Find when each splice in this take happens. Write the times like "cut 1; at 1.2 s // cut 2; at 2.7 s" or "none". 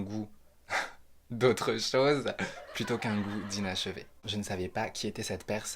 cut 1; at 4.1 s